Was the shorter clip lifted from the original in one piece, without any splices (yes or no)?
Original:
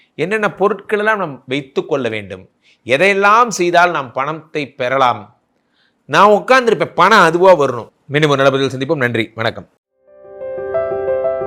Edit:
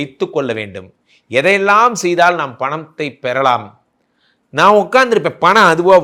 yes